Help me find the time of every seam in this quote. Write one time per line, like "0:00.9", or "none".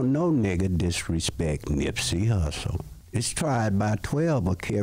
0:02.9